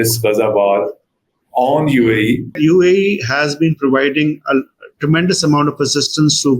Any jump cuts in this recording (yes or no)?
yes